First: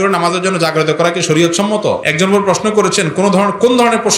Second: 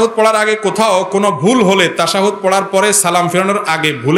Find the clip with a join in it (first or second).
first